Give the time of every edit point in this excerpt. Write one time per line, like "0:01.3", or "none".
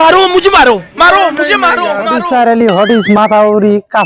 0:02.1